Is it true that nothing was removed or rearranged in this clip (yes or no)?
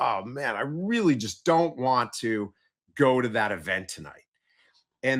yes